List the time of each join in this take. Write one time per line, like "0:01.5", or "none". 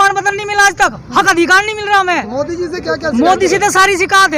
none